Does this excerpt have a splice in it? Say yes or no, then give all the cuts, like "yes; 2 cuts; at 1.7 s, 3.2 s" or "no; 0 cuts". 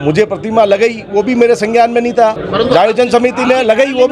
no; 0 cuts